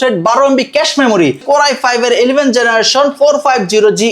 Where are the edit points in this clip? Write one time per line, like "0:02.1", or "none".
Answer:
0:01.4